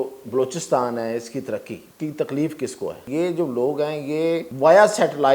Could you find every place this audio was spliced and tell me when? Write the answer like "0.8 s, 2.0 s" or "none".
1.8 s, 3.0 s, 4.5 s